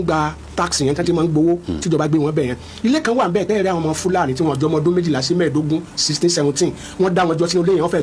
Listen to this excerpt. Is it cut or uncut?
uncut